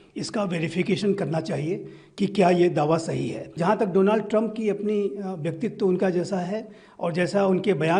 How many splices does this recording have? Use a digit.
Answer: 1